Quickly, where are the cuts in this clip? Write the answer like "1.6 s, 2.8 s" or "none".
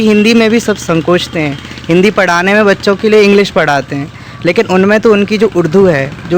none